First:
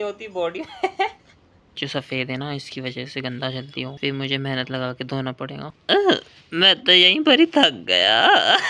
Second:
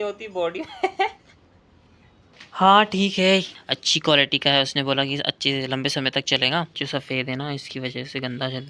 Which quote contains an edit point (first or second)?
first